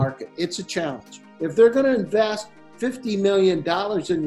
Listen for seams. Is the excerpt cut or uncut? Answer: cut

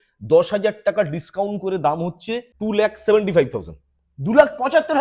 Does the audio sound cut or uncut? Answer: cut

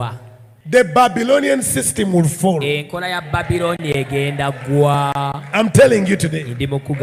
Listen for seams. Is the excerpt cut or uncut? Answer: uncut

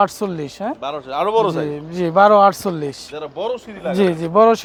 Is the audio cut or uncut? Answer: uncut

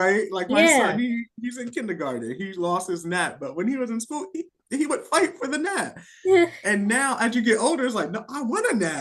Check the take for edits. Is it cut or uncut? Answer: uncut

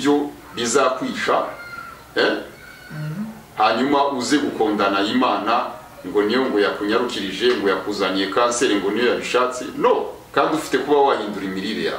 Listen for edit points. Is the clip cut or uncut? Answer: uncut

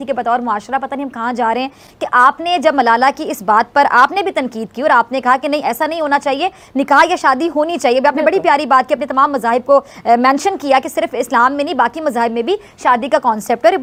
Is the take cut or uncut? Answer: uncut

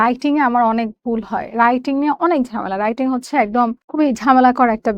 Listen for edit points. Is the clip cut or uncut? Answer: cut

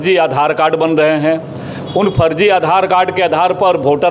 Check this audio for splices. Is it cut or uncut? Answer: uncut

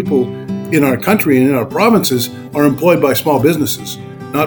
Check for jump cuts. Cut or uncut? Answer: uncut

